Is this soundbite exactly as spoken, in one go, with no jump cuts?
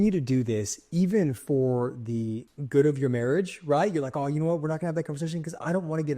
no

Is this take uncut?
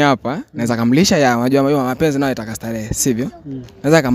yes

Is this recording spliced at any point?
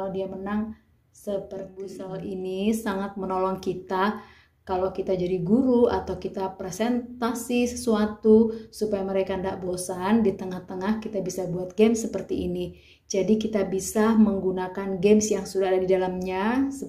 yes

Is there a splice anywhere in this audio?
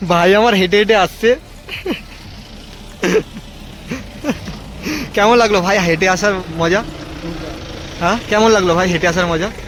no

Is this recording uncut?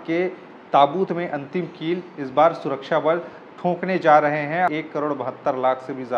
no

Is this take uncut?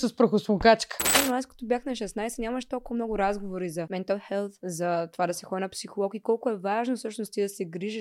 no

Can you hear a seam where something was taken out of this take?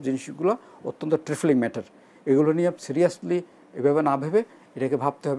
no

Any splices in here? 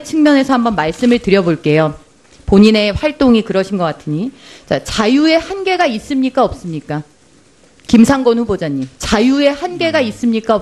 yes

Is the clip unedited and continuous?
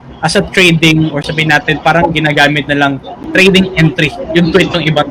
no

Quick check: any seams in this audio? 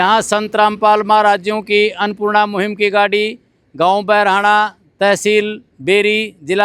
no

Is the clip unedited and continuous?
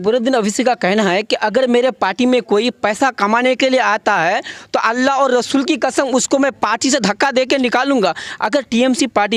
yes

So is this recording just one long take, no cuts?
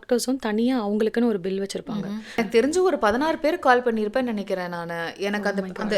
no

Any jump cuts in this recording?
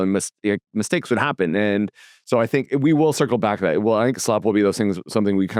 no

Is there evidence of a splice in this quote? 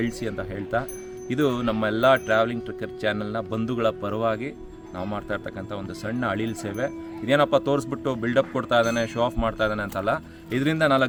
no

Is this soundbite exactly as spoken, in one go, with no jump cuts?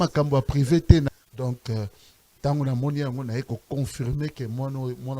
no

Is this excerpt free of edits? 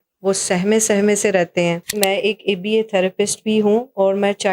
no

